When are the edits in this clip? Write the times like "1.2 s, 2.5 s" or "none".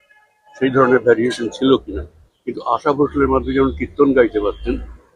none